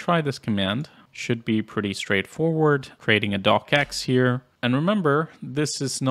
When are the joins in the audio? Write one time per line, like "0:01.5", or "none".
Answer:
0:04.5